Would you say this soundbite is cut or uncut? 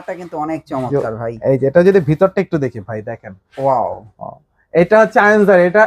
uncut